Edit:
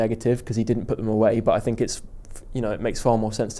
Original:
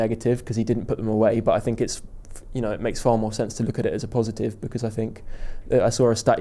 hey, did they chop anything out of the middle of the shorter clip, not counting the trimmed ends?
no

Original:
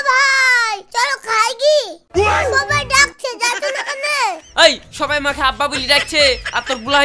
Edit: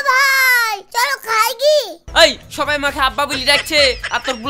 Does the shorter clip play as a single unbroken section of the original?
no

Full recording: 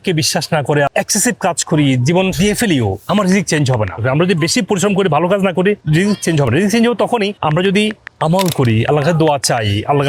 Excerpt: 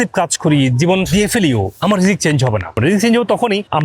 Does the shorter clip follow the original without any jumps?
no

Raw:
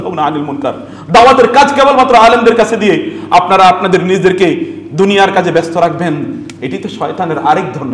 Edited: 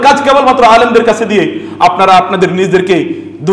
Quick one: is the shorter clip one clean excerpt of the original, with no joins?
yes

